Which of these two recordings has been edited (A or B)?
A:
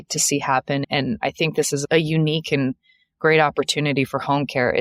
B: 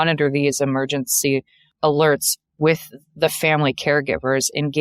B